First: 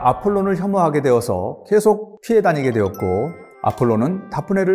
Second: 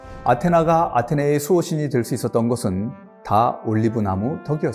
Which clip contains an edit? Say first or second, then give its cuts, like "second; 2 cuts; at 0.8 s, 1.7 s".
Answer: first; 2 cuts; at 2.1 s, 3.4 s